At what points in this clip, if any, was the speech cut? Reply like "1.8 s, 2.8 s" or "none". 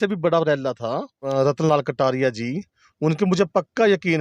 1.2 s